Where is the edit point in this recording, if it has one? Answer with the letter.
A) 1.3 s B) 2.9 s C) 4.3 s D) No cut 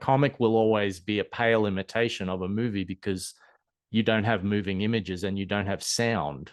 D